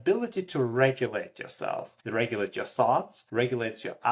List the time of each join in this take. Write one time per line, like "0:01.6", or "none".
0:01.9
0:03.2